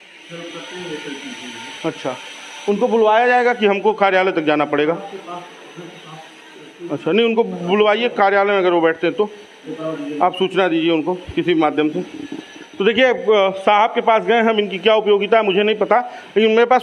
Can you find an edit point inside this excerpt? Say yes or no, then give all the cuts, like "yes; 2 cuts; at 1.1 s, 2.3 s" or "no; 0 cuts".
no; 0 cuts